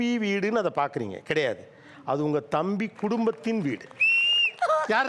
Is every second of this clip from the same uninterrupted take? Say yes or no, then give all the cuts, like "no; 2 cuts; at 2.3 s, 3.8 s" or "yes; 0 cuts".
yes; 0 cuts